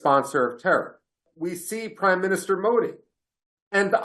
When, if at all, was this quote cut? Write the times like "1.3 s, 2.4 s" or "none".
1.3 s

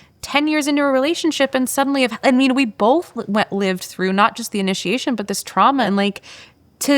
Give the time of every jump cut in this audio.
5.9 s

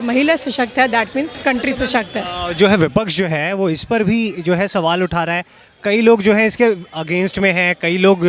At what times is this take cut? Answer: none

